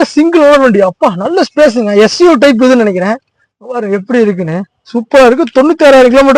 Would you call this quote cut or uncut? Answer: uncut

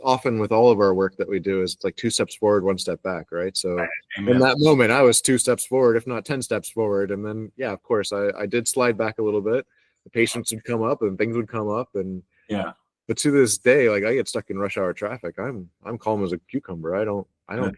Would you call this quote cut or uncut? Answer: uncut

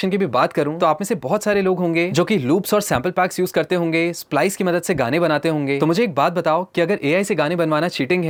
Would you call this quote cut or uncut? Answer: uncut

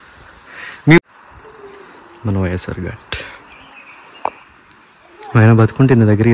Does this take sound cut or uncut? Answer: cut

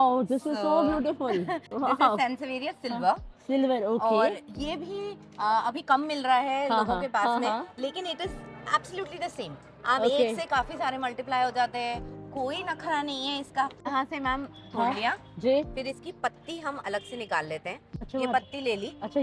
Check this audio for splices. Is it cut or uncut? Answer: cut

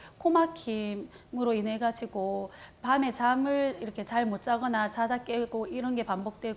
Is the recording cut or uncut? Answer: uncut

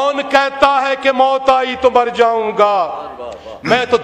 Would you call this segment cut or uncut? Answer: uncut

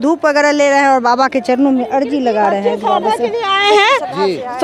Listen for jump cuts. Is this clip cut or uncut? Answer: uncut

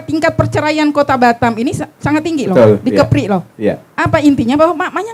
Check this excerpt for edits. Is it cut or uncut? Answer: uncut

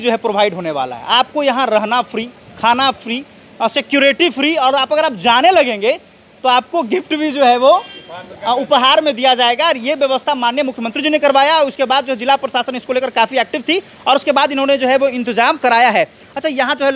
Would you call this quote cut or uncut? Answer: uncut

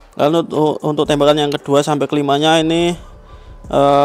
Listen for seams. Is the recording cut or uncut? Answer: uncut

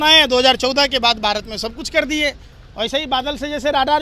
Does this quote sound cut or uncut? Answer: uncut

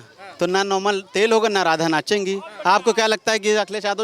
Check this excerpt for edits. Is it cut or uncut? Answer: uncut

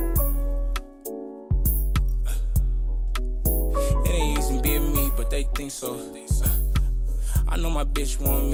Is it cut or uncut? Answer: uncut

